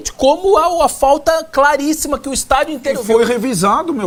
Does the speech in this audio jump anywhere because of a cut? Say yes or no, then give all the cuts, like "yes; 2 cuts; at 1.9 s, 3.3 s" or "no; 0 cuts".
no; 0 cuts